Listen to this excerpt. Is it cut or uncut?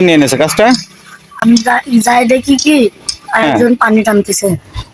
uncut